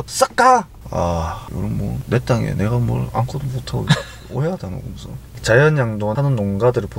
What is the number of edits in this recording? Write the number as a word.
one